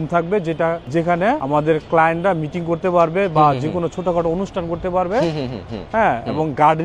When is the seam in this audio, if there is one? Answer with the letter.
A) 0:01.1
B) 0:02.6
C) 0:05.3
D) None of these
A